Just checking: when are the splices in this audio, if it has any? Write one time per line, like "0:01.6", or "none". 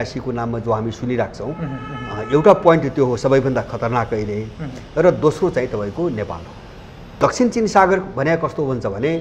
0:07.2